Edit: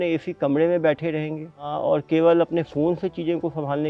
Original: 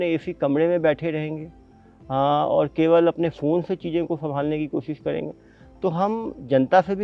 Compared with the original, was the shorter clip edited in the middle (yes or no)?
yes